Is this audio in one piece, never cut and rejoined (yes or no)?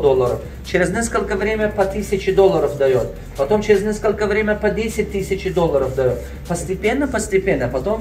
yes